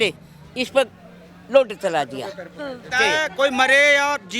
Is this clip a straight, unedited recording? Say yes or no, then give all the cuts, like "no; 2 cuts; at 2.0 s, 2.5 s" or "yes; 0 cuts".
no; 1 cut; at 2.9 s